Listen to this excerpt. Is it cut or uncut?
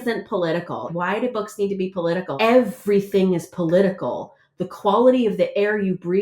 cut